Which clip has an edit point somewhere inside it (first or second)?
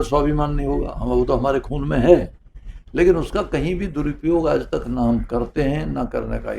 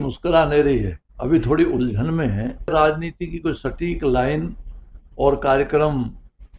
second